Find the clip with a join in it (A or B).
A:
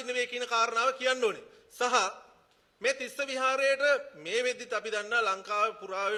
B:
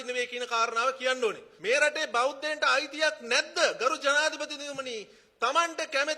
B